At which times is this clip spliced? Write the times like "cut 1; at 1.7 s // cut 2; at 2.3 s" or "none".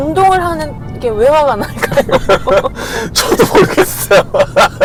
none